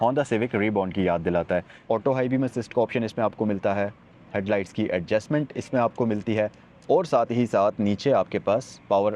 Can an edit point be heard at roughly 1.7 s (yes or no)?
yes